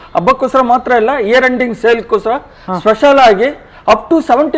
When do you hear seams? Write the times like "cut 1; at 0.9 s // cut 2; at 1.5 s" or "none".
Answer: none